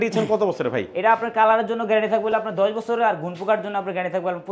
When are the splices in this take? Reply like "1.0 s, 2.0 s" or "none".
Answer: none